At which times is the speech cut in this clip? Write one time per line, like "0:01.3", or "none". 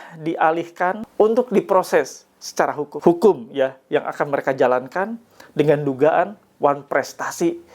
0:01.0
0:02.9